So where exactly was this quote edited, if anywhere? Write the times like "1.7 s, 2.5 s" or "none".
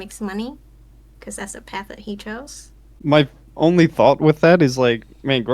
2.9 s